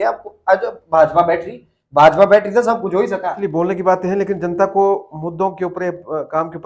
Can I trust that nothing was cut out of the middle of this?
no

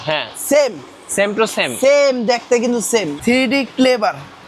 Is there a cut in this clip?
yes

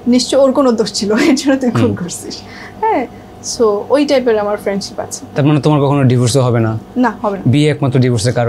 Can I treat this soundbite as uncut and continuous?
yes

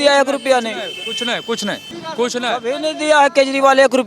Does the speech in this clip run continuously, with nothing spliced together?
no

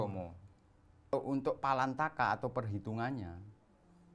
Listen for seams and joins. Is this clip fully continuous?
no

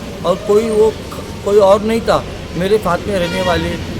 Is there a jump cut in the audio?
no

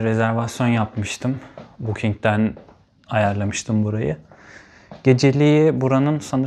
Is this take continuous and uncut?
yes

